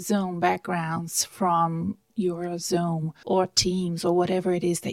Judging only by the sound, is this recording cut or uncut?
cut